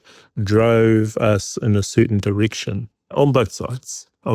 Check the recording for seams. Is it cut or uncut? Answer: cut